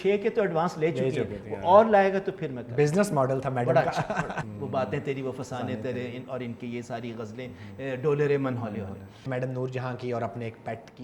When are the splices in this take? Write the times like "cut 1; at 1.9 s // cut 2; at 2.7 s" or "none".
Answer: cut 1; at 4.5 s // cut 2; at 9.3 s